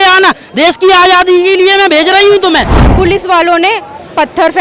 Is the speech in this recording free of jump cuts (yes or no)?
no